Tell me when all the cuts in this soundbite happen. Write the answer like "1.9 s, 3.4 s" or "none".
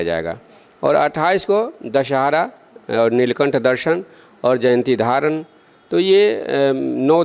none